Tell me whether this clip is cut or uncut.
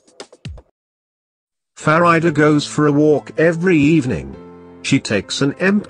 uncut